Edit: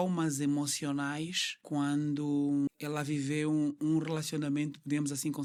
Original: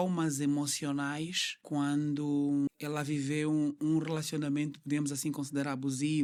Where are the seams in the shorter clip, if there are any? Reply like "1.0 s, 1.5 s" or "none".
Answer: none